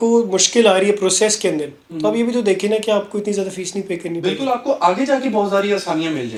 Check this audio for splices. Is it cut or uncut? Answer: uncut